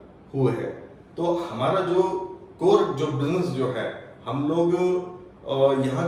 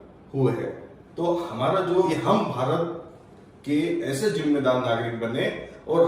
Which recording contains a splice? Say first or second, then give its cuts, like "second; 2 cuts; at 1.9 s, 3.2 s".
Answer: second; 1 cut; at 2.1 s